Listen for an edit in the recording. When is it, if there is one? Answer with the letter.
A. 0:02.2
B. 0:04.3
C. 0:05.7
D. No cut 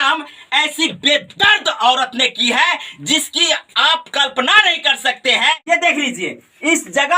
C